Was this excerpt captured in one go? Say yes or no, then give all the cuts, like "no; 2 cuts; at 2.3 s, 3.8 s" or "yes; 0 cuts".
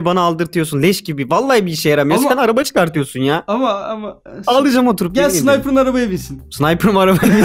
no; 1 cut; at 6.4 s